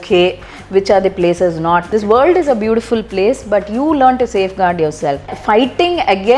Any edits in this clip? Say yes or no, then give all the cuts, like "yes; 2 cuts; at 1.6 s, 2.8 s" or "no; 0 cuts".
yes; 2 cuts; at 1.9 s, 5.4 s